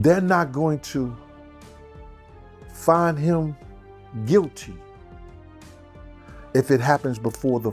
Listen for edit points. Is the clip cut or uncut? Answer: uncut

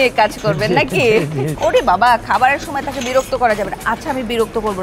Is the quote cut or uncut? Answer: cut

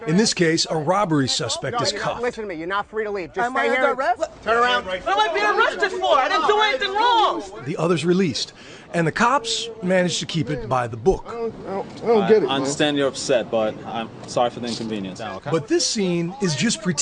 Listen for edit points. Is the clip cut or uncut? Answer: uncut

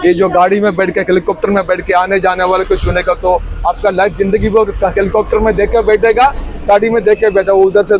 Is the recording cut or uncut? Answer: uncut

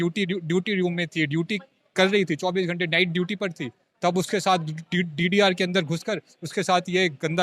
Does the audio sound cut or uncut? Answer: uncut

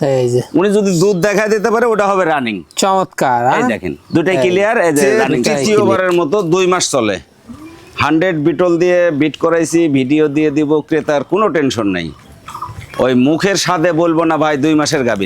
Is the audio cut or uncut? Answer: cut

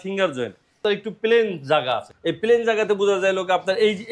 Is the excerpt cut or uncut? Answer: cut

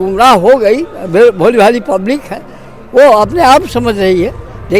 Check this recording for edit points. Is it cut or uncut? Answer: uncut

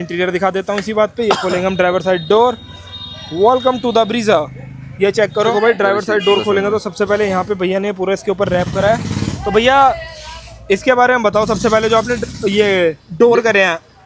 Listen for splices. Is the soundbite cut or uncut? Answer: uncut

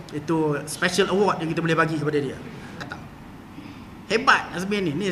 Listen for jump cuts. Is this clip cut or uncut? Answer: cut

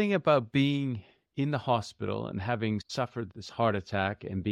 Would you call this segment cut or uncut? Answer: cut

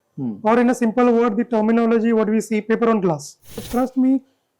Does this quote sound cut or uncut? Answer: cut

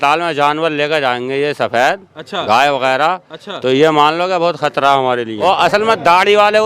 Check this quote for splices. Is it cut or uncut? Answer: cut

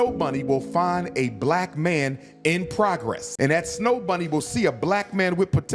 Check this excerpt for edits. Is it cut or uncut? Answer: cut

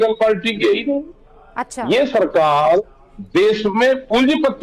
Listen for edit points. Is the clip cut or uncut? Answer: uncut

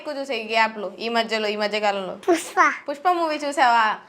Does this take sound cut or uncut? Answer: cut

